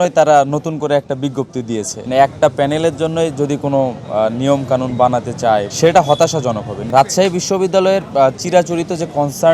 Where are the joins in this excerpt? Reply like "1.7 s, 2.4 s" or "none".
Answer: 2.0 s, 5.7 s, 6.8 s